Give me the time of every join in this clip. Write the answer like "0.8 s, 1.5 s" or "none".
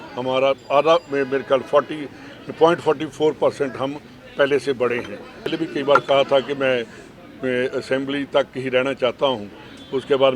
5.5 s

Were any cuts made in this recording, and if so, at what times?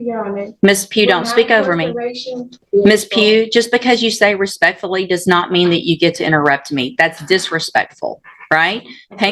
2.6 s

